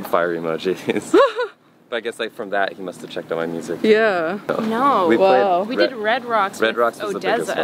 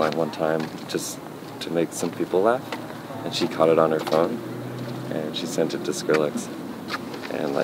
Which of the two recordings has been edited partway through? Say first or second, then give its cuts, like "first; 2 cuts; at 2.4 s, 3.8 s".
first; 1 cut; at 4.5 s